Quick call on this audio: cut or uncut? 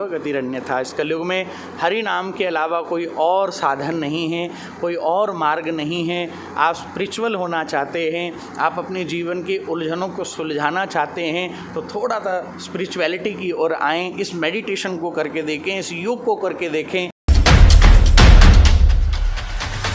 cut